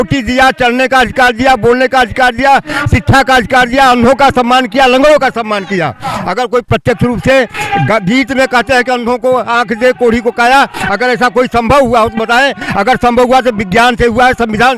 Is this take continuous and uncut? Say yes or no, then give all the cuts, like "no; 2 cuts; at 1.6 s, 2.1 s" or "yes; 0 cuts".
yes; 0 cuts